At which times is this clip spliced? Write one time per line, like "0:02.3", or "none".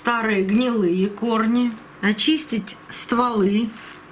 0:01.9